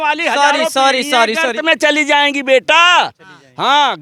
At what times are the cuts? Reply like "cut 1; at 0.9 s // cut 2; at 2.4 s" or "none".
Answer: none